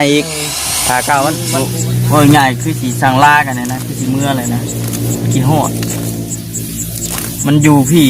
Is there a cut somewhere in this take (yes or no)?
yes